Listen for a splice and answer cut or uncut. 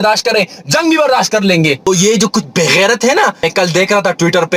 cut